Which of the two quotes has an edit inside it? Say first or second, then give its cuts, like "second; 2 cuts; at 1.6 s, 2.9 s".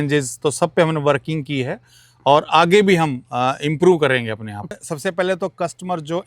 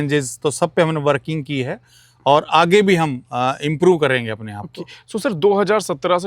first; 1 cut; at 4.9 s